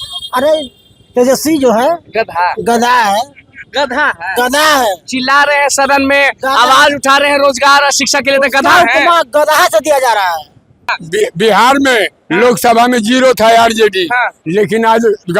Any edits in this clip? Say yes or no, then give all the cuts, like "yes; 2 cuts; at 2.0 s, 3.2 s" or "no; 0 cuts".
yes; 1 cut; at 10.9 s